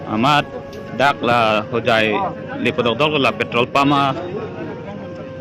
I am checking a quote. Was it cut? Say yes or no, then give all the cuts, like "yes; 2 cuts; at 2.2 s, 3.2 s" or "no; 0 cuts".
no; 0 cuts